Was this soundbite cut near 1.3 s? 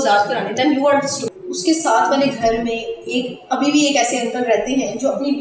yes; 1 cut; at 1.3 s

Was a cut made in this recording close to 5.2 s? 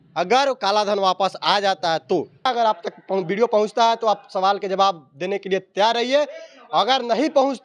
no; 1 cut; at 2.5 s

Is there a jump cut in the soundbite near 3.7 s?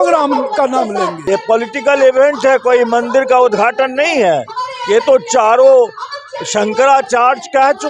no; 1 cut; at 1.2 s

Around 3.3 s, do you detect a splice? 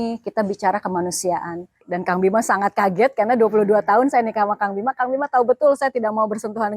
no; 1 cut; at 1.7 s

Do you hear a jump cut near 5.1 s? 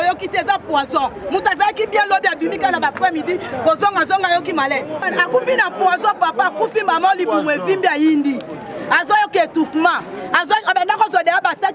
yes; 1 cut; at 5.1 s

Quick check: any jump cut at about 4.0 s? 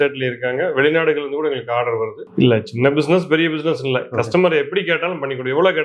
no; 1 cut; at 2.2 s

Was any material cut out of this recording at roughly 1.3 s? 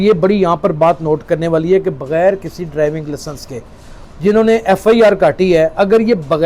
no; 1 cut; at 4.0 s

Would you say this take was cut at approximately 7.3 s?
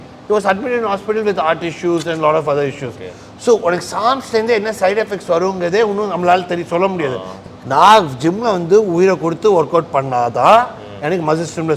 yes; 1 cut; at 7.3 s

